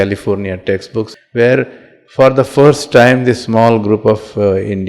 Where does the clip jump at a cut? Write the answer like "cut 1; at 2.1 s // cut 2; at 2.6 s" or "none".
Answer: cut 1; at 1.1 s